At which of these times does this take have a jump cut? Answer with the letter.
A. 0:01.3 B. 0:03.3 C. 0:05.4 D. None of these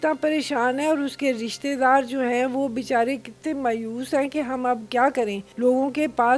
C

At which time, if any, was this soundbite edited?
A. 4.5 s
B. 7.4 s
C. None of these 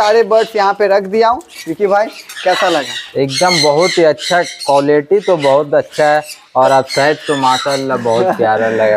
C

